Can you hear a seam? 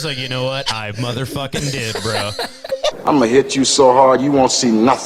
yes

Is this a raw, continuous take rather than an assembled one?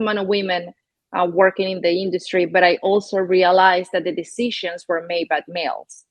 yes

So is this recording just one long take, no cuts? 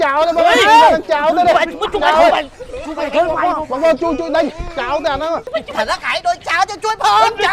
no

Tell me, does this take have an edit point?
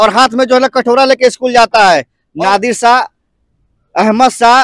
yes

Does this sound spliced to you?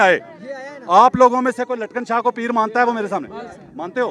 no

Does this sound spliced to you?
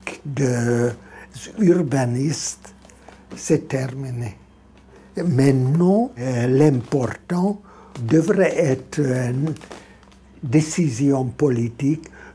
yes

